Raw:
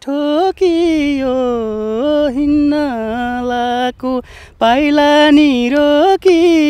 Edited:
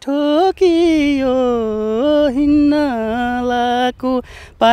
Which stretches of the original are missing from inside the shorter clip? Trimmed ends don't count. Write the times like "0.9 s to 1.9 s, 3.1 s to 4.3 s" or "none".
none